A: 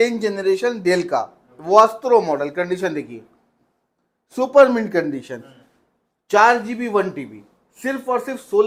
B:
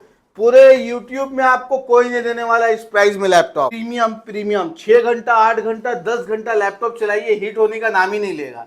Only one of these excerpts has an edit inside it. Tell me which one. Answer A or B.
B